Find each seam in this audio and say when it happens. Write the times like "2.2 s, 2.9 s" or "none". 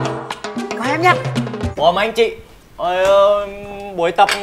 1.7 s